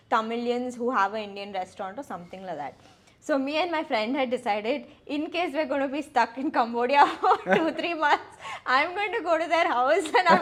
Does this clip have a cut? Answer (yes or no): no